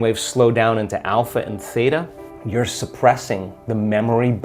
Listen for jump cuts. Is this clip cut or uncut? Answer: uncut